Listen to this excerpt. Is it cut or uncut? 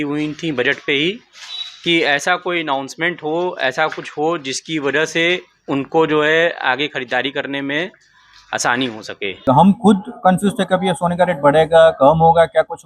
cut